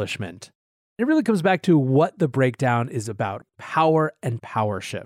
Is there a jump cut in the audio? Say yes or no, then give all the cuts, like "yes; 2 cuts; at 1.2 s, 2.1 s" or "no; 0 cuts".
yes; 2 cuts; at 1.0 s, 3.4 s